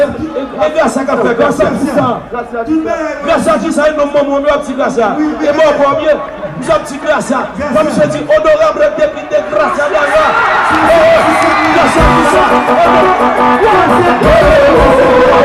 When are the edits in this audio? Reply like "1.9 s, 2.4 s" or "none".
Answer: none

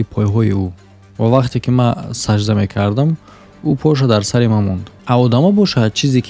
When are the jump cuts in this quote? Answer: 4.9 s

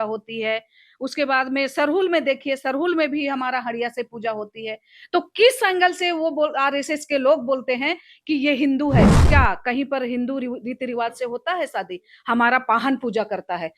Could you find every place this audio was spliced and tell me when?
9.2 s

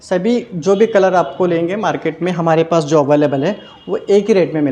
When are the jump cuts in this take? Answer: none

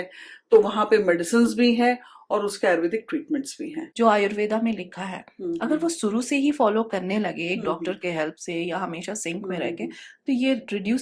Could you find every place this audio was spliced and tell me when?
3.8 s

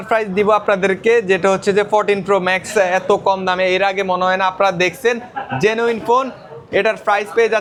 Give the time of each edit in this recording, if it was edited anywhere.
none

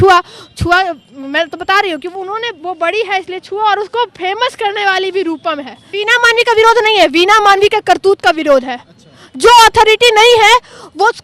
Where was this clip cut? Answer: 5.9 s

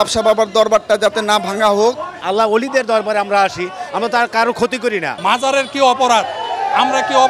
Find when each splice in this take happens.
2.1 s, 5.1 s

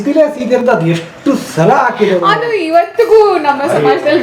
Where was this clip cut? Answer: none

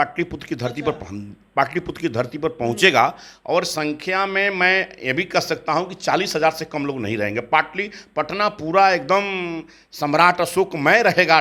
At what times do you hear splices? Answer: none

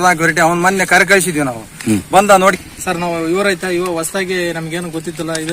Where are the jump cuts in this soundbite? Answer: 2.6 s

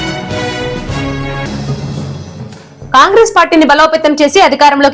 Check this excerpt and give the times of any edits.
2.1 s

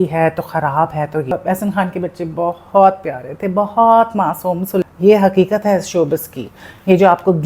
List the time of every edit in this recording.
1.3 s, 4.9 s

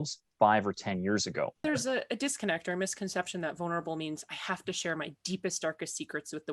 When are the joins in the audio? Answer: 1.6 s

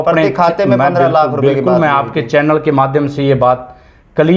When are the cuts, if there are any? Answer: none

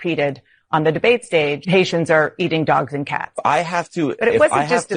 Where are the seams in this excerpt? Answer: 1.6 s, 3.4 s

